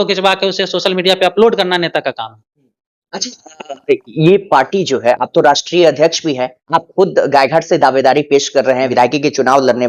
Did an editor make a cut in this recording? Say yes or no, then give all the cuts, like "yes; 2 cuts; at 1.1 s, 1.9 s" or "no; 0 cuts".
no; 0 cuts